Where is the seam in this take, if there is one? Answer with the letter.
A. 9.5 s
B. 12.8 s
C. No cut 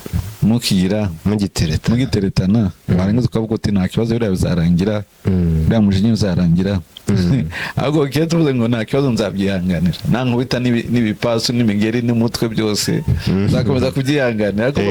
C